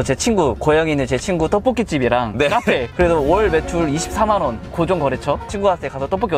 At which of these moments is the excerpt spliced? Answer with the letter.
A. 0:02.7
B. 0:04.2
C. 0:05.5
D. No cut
C